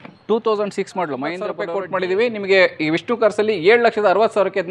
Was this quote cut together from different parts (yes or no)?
yes